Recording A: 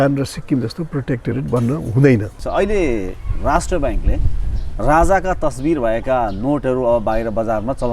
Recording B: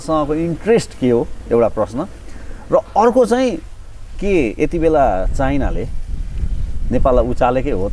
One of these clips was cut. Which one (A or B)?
A